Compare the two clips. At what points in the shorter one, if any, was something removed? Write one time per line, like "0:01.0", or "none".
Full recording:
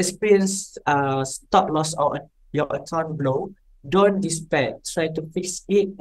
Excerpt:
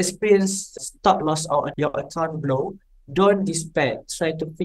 0:00.8
0:01.7